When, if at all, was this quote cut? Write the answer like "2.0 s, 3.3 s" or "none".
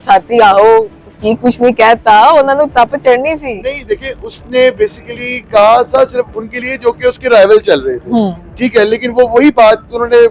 none

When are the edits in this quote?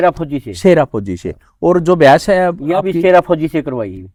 none

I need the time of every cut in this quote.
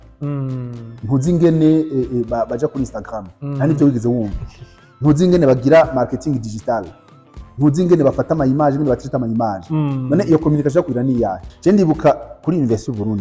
11.5 s

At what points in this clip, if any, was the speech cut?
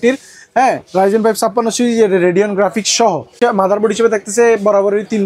3.3 s

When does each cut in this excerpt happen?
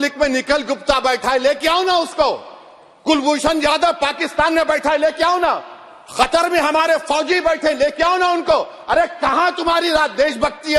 none

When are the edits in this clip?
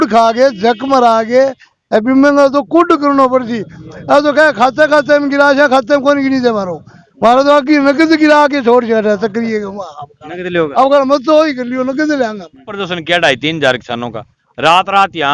12.7 s

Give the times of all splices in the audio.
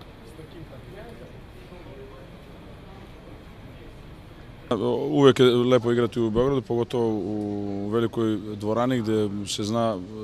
none

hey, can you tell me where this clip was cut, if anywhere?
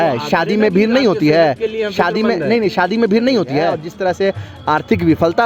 3.9 s

